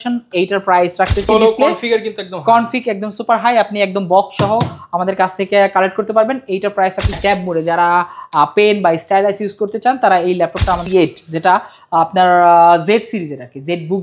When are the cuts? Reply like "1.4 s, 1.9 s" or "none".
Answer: 1.3 s, 7.2 s, 10.8 s